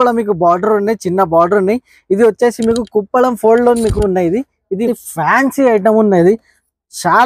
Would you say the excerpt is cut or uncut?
cut